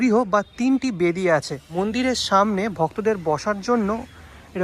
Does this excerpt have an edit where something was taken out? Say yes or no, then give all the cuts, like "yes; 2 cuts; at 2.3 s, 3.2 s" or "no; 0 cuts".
yes; 1 cut; at 1.8 s